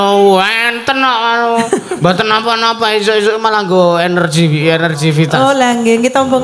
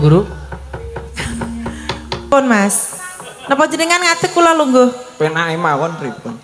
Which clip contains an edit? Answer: second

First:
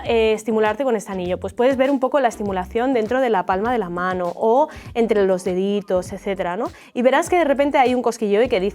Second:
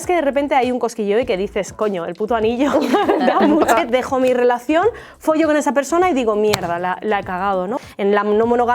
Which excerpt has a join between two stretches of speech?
second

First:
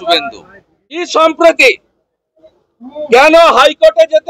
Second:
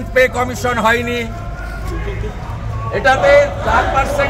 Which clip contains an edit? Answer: first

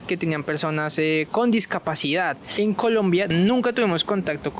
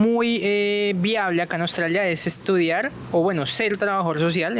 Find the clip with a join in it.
first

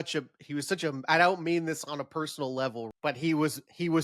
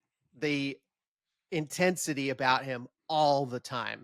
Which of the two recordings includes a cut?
first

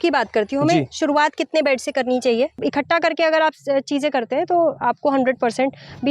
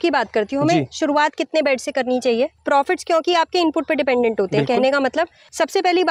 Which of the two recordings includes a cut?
first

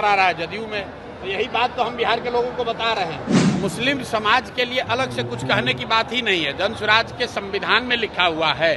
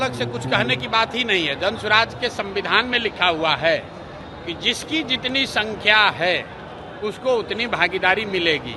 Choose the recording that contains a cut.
first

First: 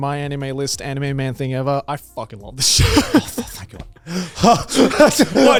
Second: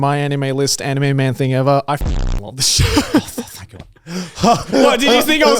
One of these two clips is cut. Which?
second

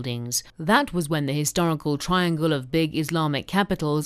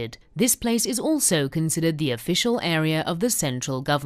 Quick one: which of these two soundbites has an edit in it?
first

